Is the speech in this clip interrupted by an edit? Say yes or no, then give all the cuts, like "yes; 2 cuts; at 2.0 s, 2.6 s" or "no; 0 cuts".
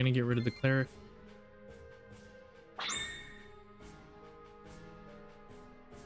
no; 0 cuts